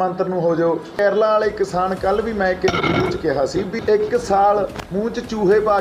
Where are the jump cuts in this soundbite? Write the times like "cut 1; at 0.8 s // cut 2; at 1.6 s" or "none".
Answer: cut 1; at 1.0 s // cut 2; at 3.7 s // cut 3; at 4.8 s